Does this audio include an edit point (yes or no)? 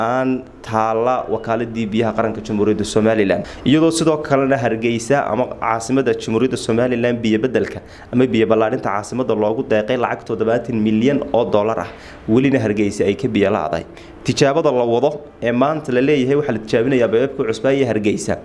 yes